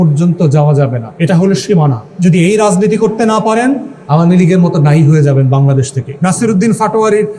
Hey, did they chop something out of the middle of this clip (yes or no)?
yes